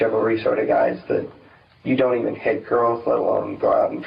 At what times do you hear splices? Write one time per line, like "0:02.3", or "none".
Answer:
none